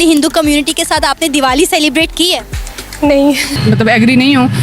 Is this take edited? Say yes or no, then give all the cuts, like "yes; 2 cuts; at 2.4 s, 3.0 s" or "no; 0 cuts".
yes; 1 cut; at 3.6 s